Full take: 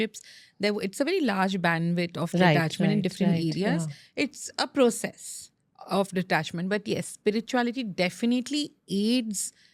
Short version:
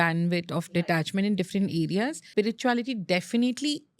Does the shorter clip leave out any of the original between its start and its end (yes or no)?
yes